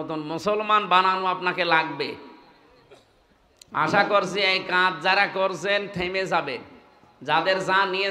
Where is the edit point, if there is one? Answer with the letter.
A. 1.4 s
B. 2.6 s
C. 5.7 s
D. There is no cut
D